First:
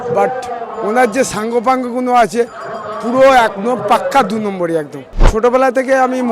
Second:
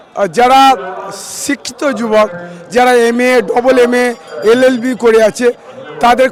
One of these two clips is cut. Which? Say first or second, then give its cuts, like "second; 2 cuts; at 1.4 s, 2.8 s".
first; 1 cut; at 5.0 s